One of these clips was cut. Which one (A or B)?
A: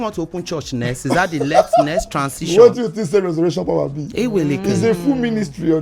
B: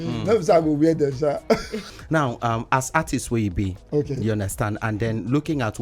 B